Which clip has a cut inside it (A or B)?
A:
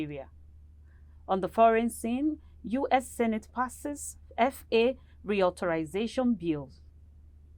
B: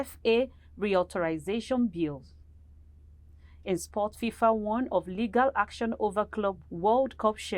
B